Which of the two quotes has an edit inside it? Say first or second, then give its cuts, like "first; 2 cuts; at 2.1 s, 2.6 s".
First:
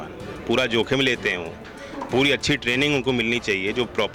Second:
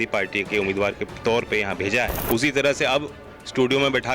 second; 1 cut; at 2.2 s